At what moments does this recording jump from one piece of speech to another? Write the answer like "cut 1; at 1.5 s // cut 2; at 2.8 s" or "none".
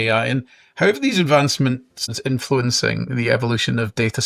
cut 1; at 2.1 s